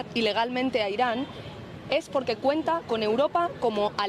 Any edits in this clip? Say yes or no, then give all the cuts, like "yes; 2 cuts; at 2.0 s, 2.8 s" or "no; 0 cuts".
no; 0 cuts